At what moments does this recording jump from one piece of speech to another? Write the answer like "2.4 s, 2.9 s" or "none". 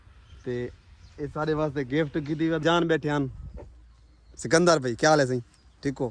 2.6 s